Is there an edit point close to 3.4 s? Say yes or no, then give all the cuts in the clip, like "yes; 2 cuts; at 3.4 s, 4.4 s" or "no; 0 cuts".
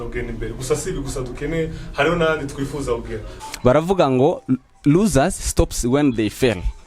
yes; 1 cut; at 3.4 s